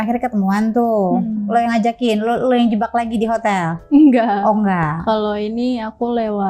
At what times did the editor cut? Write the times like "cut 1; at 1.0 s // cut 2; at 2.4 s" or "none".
none